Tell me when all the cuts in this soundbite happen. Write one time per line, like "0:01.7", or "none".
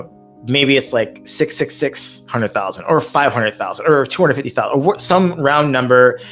none